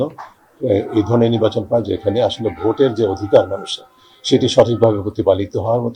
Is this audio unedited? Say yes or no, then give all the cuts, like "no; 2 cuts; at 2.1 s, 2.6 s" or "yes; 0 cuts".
yes; 0 cuts